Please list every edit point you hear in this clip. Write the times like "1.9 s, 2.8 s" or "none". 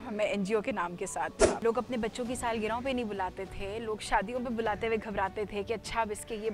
1.6 s